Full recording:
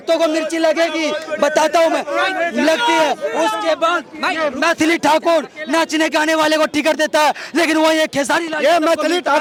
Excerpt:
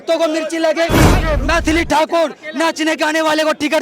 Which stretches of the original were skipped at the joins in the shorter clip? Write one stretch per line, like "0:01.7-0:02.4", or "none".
0:01.2-0:04.3